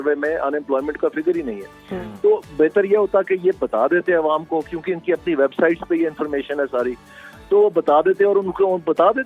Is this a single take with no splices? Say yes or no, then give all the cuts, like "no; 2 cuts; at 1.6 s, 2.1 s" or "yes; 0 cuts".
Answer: yes; 0 cuts